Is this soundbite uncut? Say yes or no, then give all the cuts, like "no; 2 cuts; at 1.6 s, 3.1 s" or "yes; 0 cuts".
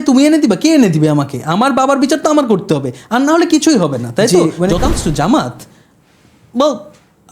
no; 1 cut; at 4.3 s